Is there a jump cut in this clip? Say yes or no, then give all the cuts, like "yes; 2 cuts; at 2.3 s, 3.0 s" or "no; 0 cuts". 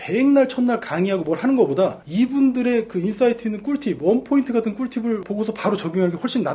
no; 0 cuts